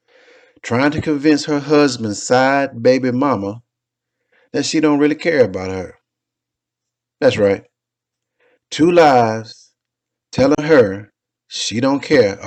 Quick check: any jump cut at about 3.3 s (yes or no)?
no